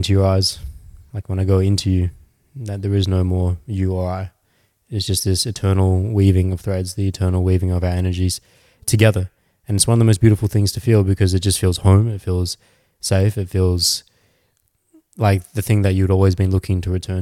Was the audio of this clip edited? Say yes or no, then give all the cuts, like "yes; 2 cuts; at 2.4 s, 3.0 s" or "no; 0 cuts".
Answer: no; 0 cuts